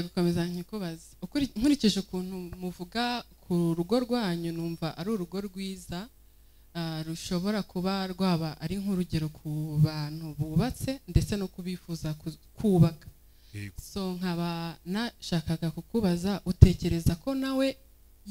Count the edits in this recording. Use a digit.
0